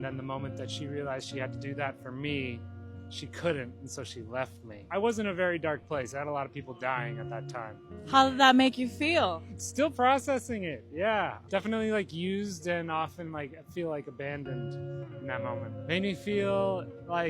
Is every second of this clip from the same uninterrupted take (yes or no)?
no